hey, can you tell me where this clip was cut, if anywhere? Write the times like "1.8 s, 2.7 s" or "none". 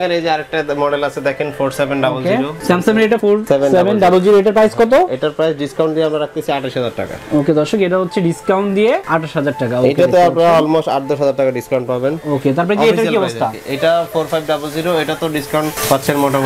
none